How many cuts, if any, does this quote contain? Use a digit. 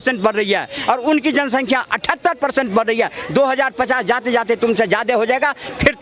0